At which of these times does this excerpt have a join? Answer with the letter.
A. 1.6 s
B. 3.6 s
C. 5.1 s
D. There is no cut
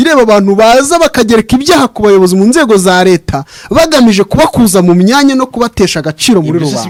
D